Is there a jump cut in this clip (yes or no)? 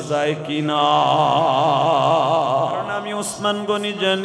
yes